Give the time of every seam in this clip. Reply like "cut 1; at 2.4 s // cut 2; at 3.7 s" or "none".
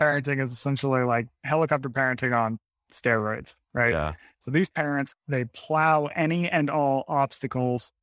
none